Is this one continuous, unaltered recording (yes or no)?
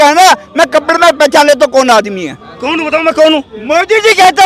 yes